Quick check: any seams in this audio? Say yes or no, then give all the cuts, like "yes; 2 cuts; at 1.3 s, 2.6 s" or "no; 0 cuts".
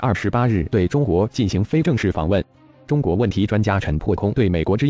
yes; 1 cut; at 2.6 s